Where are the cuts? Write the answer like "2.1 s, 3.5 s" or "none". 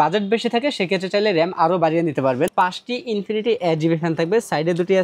2.5 s